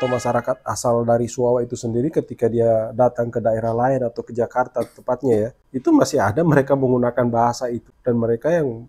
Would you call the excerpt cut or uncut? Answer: cut